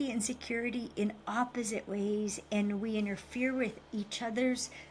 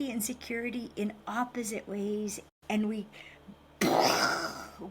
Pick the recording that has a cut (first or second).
second